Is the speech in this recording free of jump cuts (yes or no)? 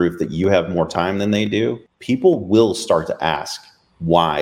no